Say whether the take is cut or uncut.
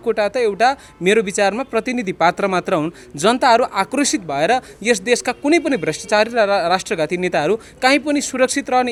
uncut